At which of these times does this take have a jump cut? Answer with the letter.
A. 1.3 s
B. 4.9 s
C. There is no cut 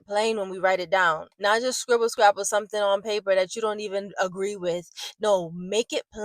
A